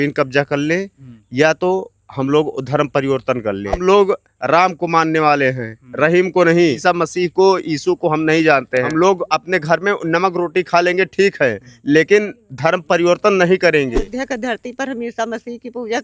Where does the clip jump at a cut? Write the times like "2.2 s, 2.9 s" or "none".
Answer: 3.8 s, 6.8 s, 8.9 s, 14.1 s